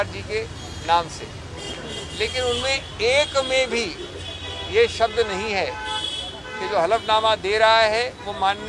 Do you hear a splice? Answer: no; 0 cuts

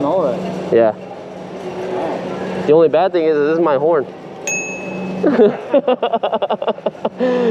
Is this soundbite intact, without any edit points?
yes; 0 cuts

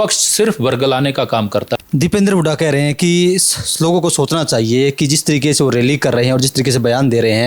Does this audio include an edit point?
yes; 1 cut; at 1.8 s

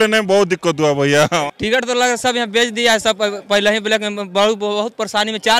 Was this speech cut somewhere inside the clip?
yes; 1 cut; at 1.5 s

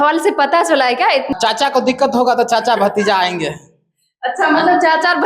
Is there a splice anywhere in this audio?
yes; 1 cut; at 1.3 s

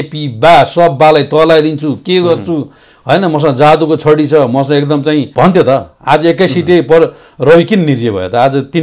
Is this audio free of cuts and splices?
no; 1 cut; at 5.3 s

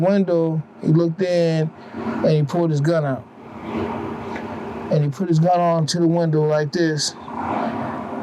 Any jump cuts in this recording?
no; 0 cuts

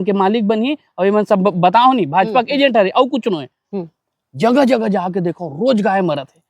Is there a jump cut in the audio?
yes; 1 cut; at 3.5 s

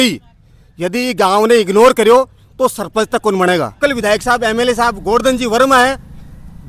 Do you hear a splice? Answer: yes; 1 cut; at 3.8 s

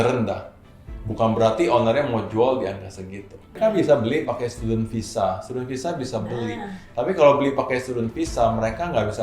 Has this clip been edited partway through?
yes; 1 cut; at 3.6 s

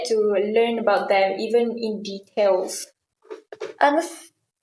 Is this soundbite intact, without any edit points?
yes; 0 cuts

